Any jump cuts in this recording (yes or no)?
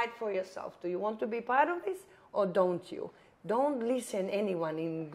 no